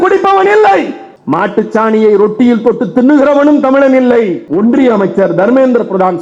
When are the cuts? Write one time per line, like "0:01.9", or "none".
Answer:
0:04.4